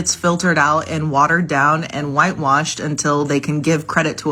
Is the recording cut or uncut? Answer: uncut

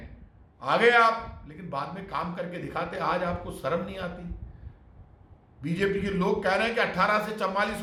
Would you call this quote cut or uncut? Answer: uncut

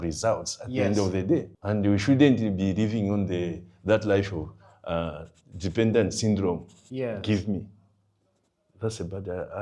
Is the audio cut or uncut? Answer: uncut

